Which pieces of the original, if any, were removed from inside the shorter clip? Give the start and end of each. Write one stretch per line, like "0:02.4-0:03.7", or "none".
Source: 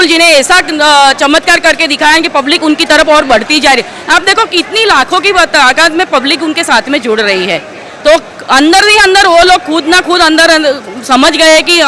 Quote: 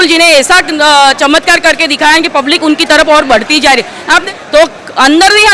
0:04.3-0:07.8